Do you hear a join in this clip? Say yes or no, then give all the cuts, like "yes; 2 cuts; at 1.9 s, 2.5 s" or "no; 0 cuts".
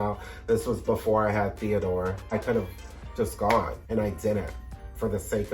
yes; 2 cuts; at 2.3 s, 3.8 s